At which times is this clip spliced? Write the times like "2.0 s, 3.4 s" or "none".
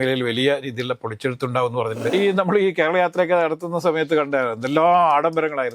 2.1 s